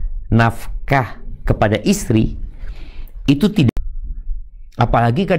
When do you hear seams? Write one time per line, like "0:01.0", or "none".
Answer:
0:03.7